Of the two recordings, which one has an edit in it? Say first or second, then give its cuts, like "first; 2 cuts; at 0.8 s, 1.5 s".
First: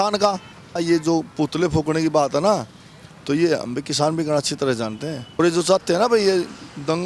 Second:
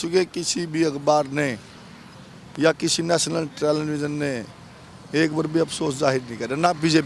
first; 2 cuts; at 0.8 s, 5.4 s